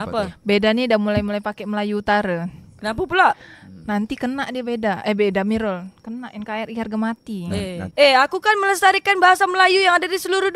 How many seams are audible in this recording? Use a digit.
0